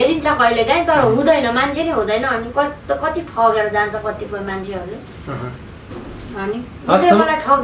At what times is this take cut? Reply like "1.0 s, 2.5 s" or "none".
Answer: none